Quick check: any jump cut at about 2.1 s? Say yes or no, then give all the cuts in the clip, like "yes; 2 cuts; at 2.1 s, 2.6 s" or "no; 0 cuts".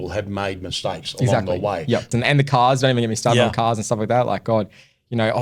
yes; 1 cut; at 2.1 s